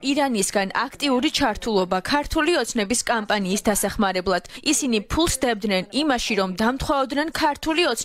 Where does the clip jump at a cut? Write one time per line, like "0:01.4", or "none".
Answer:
0:04.5